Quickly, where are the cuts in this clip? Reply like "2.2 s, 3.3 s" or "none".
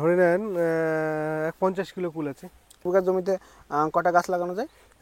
2.8 s